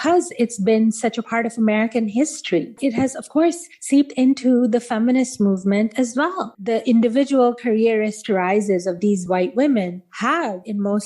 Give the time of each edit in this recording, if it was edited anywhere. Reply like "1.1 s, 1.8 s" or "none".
2.8 s, 6.5 s